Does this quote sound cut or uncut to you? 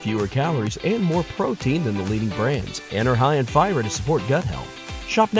uncut